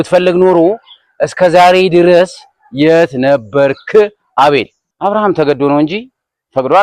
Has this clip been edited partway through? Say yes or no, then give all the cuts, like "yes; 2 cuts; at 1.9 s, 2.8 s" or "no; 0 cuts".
yes; 1 cut; at 4.8 s